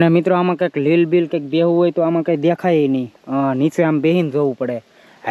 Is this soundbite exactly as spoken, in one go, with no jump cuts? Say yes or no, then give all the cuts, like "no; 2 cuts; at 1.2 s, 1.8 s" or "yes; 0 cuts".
yes; 0 cuts